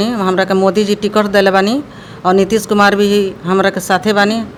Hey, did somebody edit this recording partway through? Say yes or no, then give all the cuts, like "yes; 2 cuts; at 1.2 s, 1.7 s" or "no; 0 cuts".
no; 0 cuts